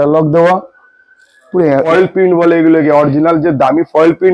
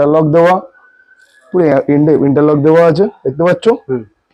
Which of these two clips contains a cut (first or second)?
first